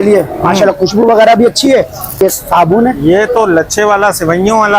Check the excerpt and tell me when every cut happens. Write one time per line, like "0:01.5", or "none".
0:02.2